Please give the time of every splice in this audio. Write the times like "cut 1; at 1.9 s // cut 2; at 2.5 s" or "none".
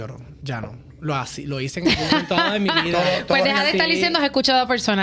none